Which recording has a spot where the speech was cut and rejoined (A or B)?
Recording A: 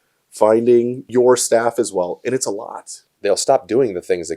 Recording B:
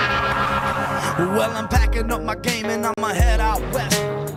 A